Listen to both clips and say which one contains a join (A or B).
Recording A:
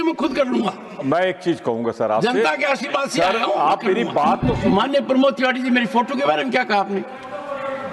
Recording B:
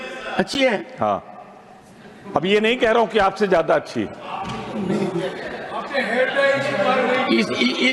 A